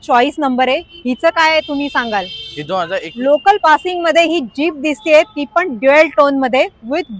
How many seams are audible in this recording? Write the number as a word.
one